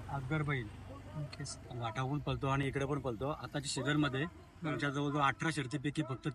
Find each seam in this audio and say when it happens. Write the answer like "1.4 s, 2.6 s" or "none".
none